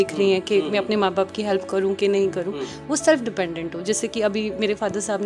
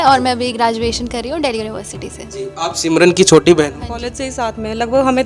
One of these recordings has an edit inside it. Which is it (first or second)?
second